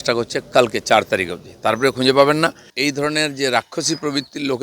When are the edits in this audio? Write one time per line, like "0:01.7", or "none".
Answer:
0:02.7